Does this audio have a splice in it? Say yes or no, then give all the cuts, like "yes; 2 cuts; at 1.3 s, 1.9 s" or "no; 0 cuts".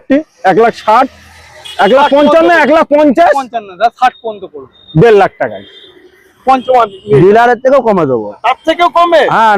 yes; 1 cut; at 6.6 s